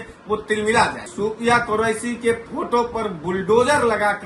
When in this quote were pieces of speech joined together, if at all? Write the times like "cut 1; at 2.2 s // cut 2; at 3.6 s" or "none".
cut 1; at 1.1 s